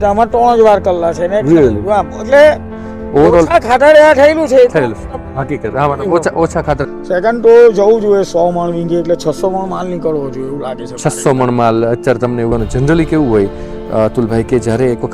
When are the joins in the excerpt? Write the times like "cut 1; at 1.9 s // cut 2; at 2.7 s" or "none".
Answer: cut 1; at 6.9 s // cut 2; at 12.5 s